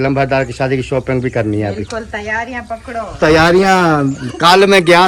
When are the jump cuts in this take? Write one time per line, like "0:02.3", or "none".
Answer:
none

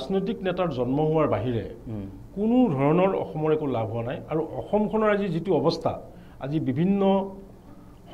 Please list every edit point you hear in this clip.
none

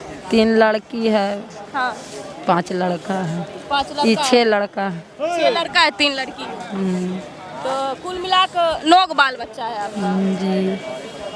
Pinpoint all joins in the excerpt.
none

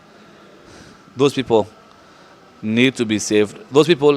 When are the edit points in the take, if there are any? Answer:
none

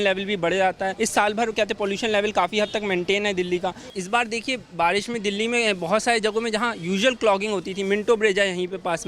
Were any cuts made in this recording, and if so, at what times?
0:00.9
0:03.8

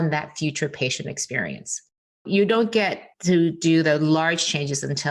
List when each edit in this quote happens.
0:02.2
0:03.1

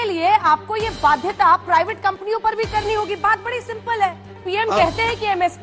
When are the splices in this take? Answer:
0:04.4

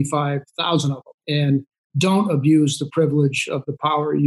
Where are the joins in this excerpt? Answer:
0:01.1

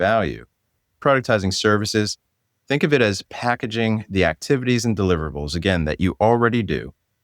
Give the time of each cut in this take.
0:01.0

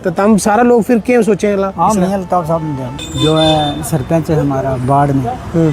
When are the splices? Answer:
0:03.0

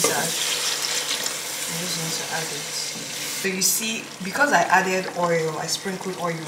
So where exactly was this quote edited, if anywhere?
0:03.3

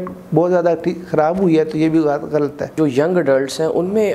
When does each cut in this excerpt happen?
0:02.7

